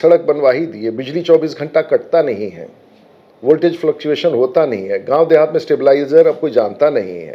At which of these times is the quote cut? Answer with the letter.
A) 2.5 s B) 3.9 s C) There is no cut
C